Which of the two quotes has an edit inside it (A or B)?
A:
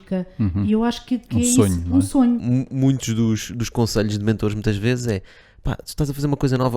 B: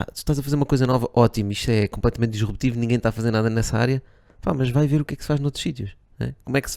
A